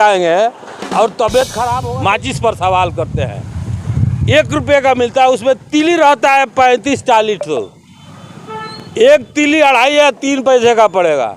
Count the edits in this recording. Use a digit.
1